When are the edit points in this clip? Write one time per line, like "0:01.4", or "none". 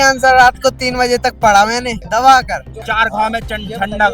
0:02.0
0:02.7